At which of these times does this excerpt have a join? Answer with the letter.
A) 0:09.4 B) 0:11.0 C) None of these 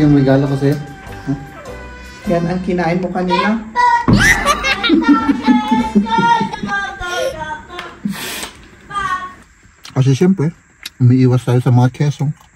A